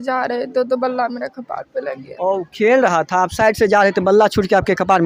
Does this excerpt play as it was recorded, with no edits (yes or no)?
yes